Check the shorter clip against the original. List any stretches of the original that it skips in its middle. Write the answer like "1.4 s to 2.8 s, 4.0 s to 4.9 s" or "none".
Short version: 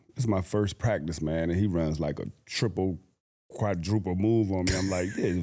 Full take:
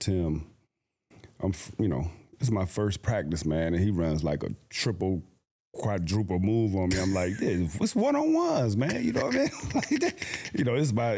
none